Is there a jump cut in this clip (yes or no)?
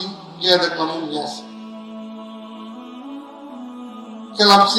yes